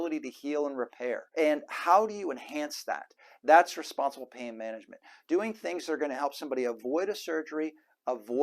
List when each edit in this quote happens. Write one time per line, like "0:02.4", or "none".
0:01.2

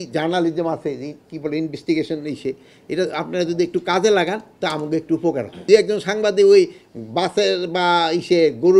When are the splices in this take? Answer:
0:05.6

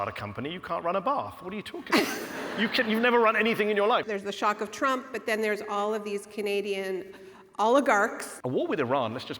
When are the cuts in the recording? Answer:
0:04.0
0:08.3

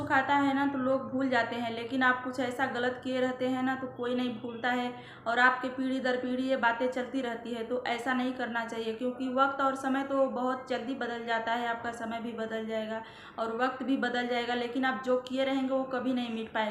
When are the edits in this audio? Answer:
none

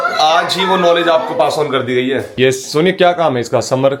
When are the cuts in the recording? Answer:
0:02.3

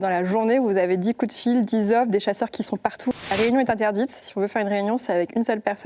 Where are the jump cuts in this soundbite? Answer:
0:03.2

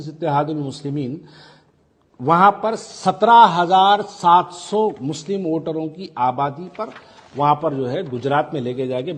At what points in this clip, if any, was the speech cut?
none

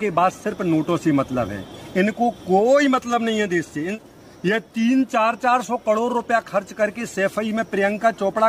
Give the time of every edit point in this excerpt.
0:04.0

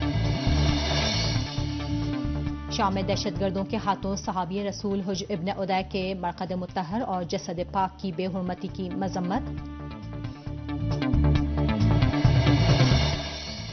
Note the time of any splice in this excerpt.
0:06.7

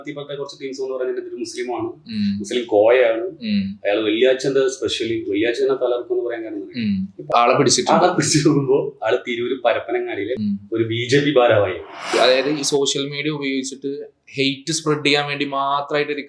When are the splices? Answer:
0:07.3
0:10.4
0:12.2

